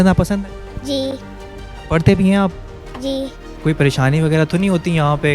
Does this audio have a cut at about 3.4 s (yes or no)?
yes